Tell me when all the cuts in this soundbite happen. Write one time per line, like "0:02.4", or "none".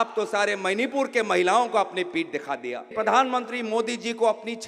0:02.9